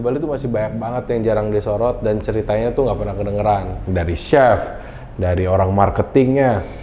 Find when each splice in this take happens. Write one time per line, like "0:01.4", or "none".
0:03.8